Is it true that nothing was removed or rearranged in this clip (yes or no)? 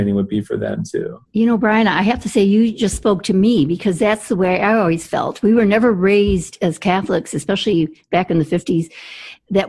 yes